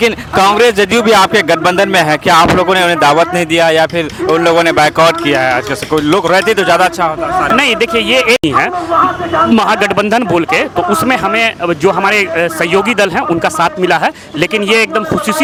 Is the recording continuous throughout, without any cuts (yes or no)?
yes